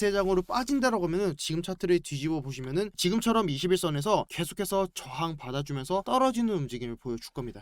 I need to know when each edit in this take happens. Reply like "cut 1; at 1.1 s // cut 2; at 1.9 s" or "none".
cut 1; at 3.0 s